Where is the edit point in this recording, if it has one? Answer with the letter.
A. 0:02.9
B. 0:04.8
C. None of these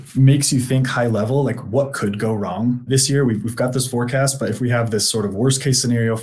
A